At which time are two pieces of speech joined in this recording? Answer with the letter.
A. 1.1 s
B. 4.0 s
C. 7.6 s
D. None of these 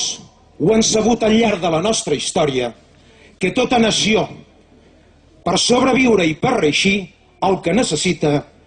B